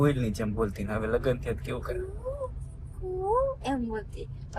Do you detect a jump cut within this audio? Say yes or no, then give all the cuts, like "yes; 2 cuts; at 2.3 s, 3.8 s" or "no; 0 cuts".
no; 0 cuts